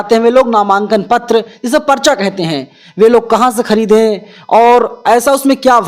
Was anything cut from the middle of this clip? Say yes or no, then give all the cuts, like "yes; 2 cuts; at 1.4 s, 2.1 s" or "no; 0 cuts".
no; 0 cuts